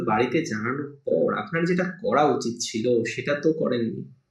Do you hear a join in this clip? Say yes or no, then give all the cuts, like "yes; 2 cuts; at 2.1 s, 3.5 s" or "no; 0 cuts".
no; 0 cuts